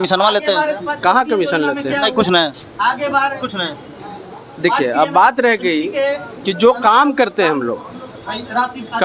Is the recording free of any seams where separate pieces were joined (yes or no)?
yes